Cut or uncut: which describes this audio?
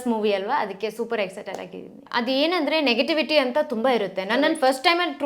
cut